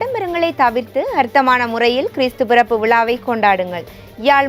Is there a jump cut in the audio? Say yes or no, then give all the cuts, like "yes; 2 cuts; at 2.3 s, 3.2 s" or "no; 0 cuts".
no; 0 cuts